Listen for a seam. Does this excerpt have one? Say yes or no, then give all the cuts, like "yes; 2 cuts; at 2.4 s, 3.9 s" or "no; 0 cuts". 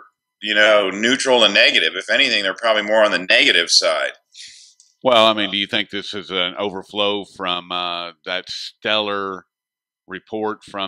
no; 0 cuts